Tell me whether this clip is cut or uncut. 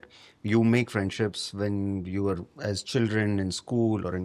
uncut